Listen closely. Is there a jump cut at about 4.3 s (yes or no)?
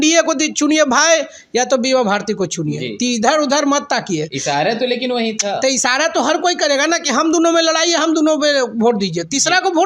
no